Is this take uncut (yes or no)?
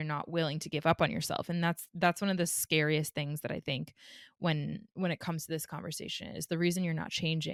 yes